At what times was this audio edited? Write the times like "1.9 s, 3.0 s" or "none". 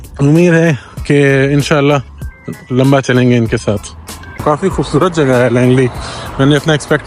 4.4 s

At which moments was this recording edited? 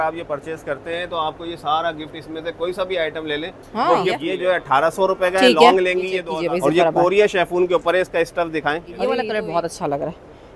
4.3 s, 6.3 s, 9.2 s

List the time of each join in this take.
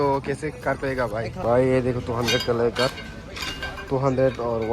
1.4 s

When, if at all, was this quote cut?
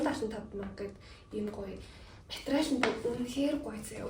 none

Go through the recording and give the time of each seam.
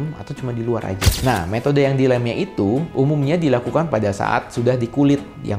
1.1 s

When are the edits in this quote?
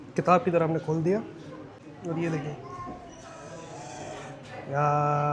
none

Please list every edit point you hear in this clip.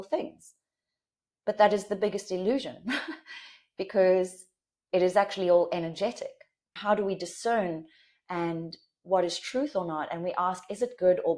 6.7 s

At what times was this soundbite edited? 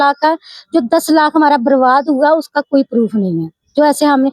none

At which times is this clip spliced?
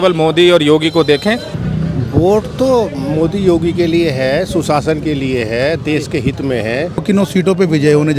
1.5 s, 7.0 s

